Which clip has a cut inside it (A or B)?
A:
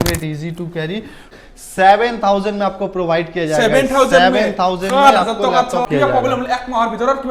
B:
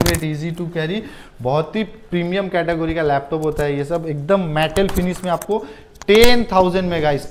A